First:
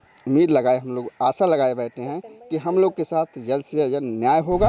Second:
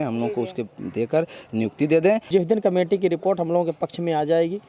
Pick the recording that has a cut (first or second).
second